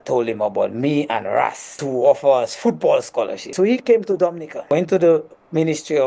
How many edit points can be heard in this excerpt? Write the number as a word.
three